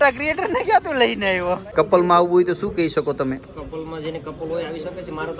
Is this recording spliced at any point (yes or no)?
yes